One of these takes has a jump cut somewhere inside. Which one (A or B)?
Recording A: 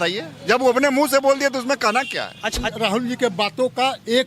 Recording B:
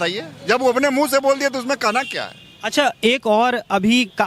A